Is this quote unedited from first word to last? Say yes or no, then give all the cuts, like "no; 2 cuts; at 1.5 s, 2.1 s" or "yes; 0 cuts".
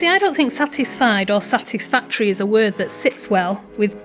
yes; 0 cuts